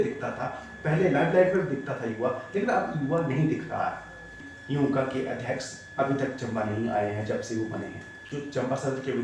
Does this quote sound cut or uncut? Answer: cut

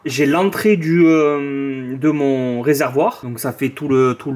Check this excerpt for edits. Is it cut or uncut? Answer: uncut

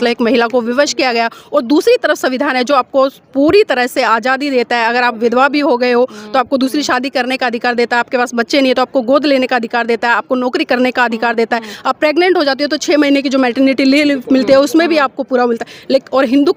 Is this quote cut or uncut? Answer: uncut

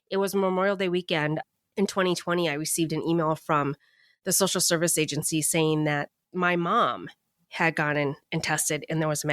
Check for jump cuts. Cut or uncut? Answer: cut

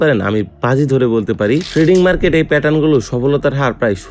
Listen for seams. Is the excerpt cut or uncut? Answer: cut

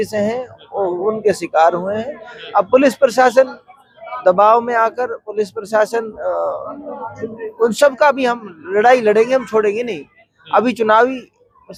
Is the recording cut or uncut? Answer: uncut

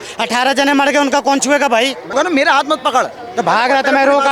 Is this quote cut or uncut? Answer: cut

